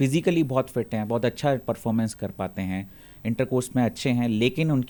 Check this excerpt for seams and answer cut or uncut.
uncut